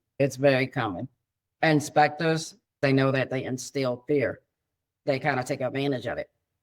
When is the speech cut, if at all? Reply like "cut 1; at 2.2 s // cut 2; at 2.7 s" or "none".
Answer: cut 1; at 2.8 s